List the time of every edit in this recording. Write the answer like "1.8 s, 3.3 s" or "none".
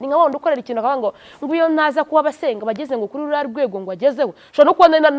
none